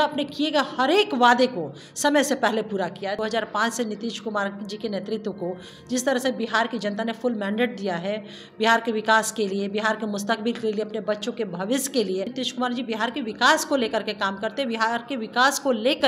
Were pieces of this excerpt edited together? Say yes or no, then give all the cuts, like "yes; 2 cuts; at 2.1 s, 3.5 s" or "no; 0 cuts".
yes; 2 cuts; at 3.2 s, 12.4 s